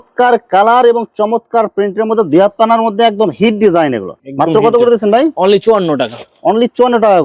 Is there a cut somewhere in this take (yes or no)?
no